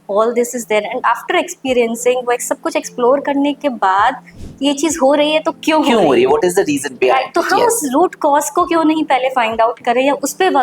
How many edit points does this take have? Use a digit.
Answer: 1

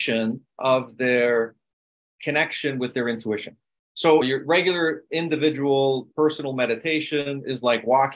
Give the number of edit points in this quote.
1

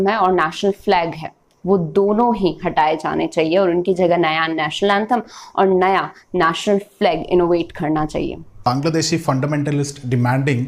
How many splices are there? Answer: 1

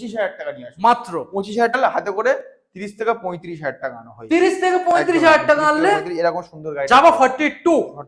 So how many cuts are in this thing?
1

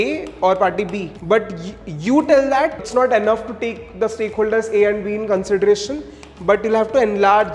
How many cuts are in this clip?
2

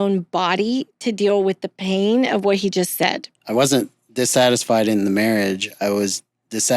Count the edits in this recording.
1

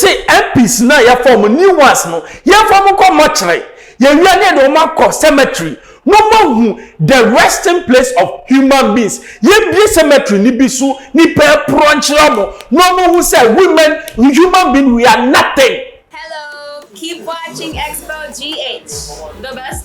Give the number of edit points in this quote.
1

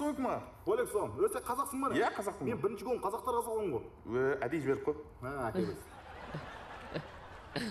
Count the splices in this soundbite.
0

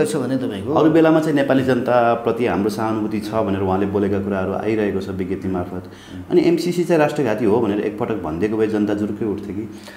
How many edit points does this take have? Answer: 0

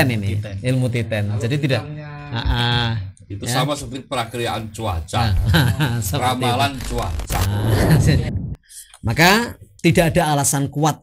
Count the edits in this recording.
1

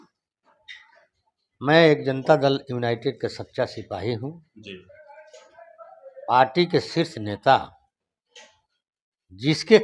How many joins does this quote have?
0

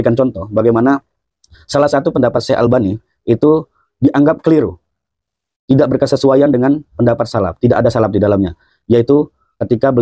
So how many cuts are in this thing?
0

